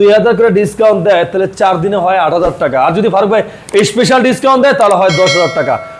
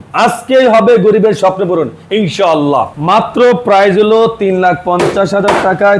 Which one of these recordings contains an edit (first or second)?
second